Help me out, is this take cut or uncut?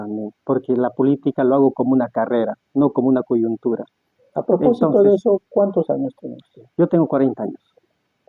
uncut